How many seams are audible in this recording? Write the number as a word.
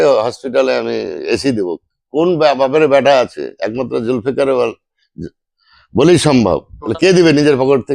one